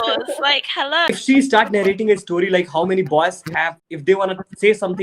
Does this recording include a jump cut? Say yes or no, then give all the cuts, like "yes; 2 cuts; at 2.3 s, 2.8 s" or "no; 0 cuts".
yes; 2 cuts; at 1.1 s, 3.8 s